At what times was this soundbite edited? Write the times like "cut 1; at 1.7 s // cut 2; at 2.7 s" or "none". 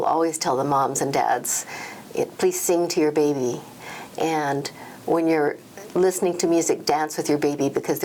none